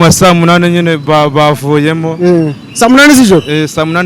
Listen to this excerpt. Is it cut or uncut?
uncut